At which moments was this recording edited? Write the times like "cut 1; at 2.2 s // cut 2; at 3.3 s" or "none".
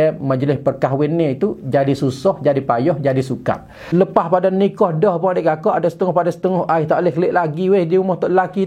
cut 1; at 3.9 s

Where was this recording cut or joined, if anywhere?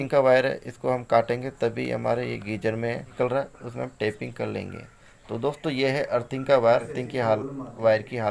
cut 1; at 3.1 s // cut 2; at 7.0 s

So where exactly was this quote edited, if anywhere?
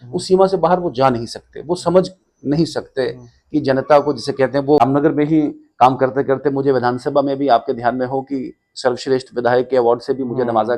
cut 1; at 4.8 s

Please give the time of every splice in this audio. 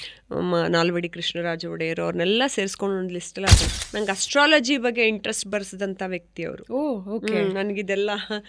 cut 1; at 3.6 s

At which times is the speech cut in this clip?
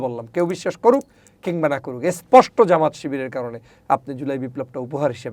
none

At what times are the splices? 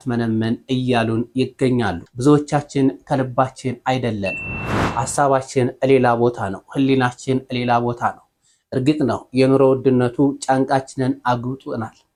none

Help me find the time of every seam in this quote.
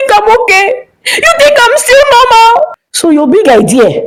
none

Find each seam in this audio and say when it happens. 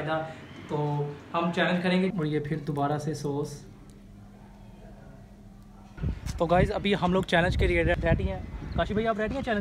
cut 1; at 2.1 s // cut 2; at 5.9 s

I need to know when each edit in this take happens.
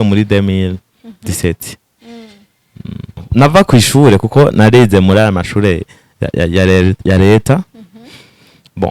cut 1; at 3.2 s

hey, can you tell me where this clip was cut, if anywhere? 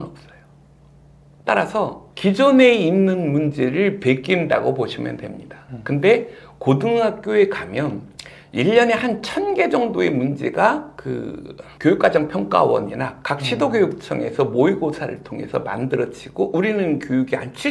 none

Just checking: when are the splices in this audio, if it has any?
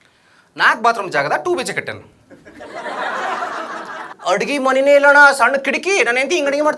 cut 1; at 4.0 s

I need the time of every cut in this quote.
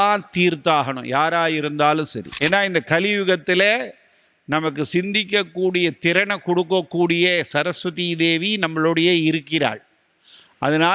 cut 1; at 2.2 s

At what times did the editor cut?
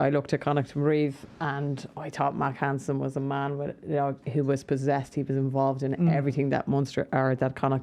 none

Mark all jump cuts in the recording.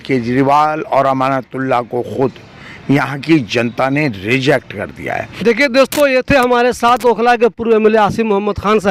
none

